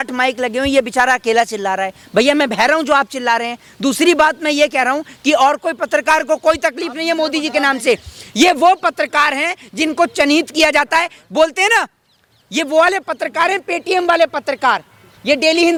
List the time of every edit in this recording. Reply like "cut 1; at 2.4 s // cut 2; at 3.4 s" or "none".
none